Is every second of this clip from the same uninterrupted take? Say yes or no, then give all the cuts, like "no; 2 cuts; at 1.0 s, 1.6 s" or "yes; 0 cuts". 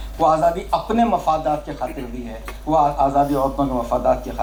yes; 0 cuts